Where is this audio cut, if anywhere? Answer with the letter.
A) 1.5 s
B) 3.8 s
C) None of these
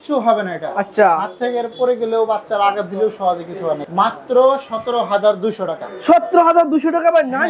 B